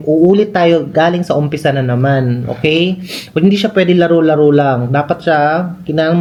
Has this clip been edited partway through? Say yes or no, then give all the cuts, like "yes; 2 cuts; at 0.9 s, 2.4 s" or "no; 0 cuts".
no; 0 cuts